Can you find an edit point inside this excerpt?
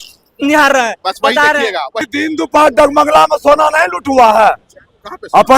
yes; 1 cut; at 2.1 s

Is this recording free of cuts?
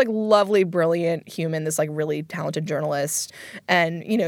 no; 1 cut; at 3.3 s

